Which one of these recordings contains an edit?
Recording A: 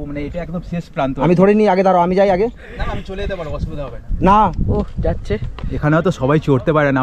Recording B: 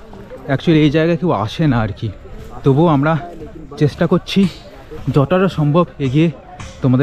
A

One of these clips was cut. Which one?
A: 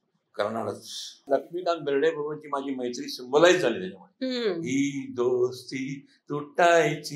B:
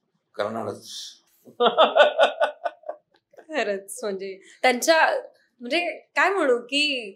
A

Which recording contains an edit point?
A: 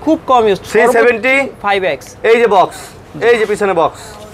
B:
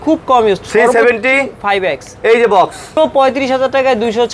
B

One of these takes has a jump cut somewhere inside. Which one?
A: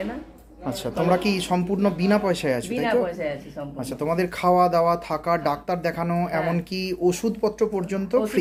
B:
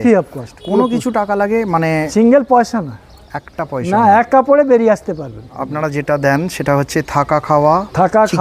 B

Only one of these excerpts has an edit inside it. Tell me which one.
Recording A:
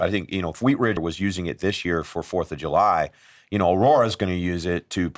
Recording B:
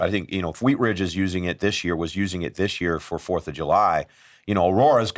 A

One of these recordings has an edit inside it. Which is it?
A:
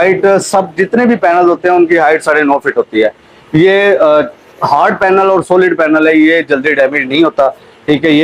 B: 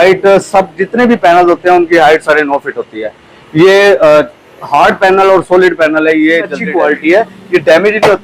B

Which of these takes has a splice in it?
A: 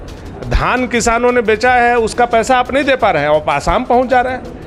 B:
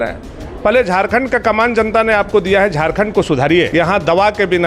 B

